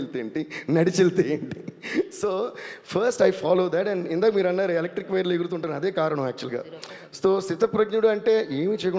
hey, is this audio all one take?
yes; 0 cuts

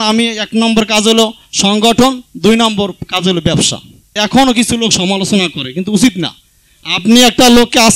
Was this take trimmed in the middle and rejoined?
yes; 1 cut; at 4.1 s

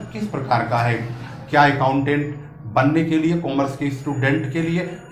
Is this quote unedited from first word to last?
yes; 0 cuts

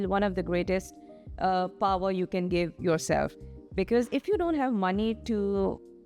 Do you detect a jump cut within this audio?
no; 0 cuts

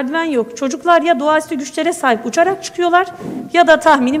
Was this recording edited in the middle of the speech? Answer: no; 0 cuts

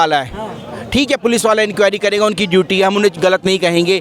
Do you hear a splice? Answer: no; 0 cuts

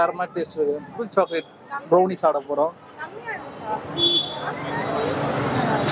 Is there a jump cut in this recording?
yes; 1 cut; at 0.9 s

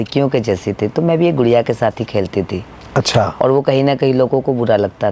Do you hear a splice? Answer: no; 0 cuts

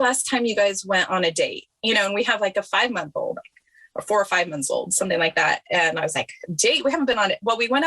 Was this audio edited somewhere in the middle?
no; 0 cuts

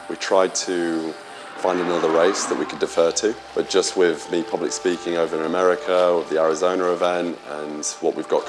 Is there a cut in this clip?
no; 0 cuts

